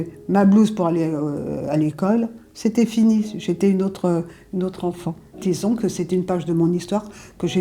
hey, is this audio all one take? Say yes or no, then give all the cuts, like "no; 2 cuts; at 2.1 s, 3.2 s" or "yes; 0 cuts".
yes; 0 cuts